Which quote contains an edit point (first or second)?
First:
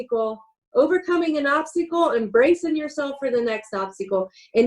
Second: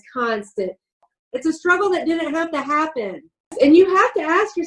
second